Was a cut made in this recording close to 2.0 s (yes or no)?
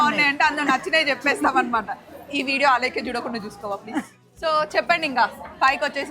no